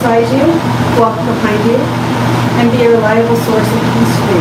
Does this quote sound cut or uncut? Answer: uncut